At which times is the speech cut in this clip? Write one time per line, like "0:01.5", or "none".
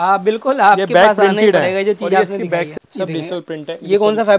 0:02.8